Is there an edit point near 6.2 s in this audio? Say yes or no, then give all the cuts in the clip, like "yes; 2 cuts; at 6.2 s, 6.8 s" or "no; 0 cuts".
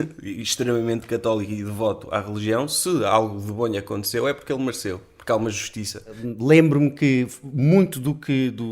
yes; 1 cut; at 6.2 s